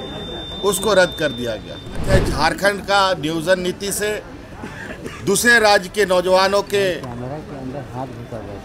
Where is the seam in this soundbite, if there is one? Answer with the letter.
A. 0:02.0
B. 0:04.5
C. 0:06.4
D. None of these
A